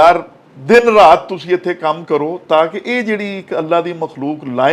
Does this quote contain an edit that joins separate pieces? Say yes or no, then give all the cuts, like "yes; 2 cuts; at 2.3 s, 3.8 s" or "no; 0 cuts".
no; 0 cuts